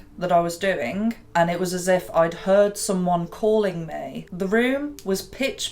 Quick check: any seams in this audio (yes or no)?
yes